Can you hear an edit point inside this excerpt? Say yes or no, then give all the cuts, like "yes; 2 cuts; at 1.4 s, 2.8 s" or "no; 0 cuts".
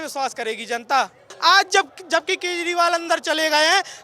yes; 1 cut; at 1.2 s